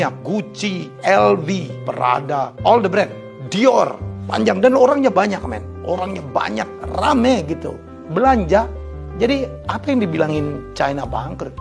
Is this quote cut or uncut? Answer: uncut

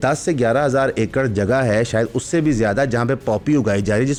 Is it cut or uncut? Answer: uncut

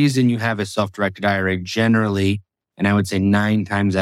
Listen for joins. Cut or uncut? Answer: uncut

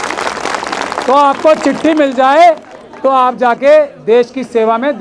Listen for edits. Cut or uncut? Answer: uncut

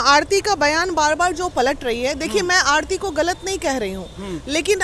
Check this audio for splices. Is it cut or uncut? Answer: uncut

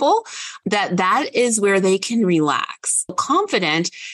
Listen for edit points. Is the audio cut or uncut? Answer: cut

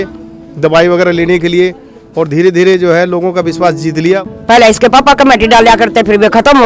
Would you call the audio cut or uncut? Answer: cut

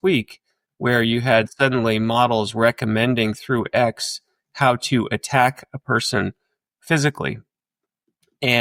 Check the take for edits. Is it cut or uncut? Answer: uncut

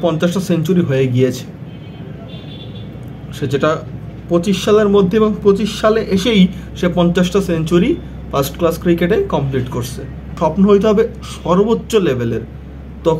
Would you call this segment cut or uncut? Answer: cut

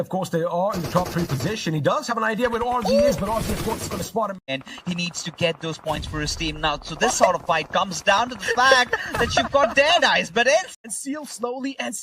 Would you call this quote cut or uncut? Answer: cut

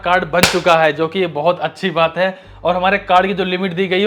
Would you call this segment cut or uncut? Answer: uncut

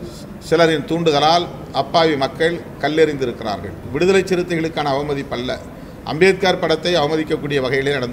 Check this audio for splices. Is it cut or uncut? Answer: cut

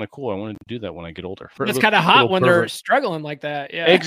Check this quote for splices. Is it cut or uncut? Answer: cut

